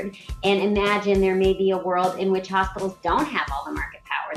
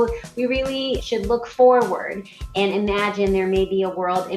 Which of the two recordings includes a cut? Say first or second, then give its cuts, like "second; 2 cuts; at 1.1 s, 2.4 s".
second; 1 cut; at 1.0 s